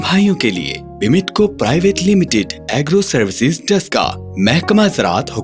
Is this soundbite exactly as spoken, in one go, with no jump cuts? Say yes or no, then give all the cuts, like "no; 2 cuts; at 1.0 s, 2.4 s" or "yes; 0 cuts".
yes; 0 cuts